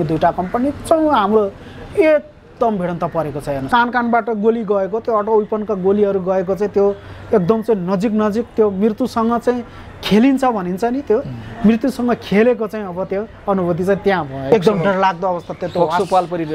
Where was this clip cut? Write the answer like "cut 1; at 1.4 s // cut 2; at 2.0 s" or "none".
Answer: cut 1; at 3.6 s // cut 2; at 14.5 s